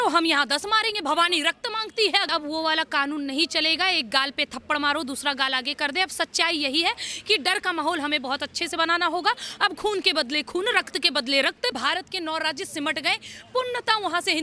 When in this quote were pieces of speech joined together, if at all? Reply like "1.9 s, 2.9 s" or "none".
2.3 s, 11.8 s